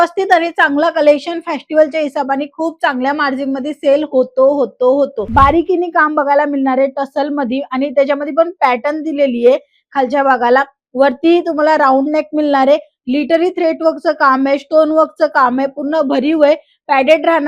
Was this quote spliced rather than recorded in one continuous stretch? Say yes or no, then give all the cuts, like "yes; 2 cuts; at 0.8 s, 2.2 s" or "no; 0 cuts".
yes; 1 cut; at 5.2 s